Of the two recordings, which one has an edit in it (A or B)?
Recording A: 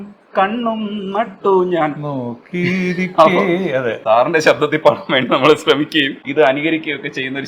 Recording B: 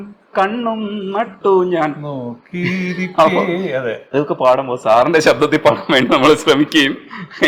A